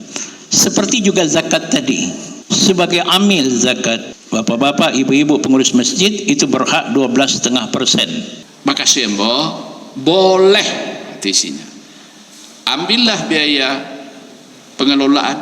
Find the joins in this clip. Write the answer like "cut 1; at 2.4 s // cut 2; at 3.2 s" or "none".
cut 1; at 2.3 s // cut 2; at 4.1 s // cut 3; at 8.4 s